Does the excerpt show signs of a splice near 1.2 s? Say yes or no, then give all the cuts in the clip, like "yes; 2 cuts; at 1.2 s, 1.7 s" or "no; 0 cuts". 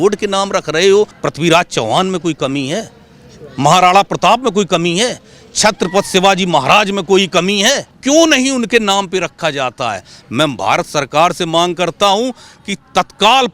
yes; 2 cuts; at 1.2 s, 7.9 s